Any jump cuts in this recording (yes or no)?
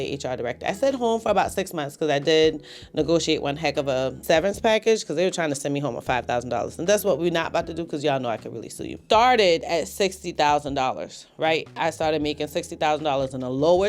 yes